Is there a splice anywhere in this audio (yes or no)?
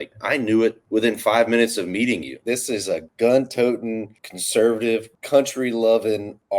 yes